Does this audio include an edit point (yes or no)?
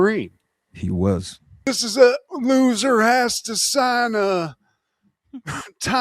yes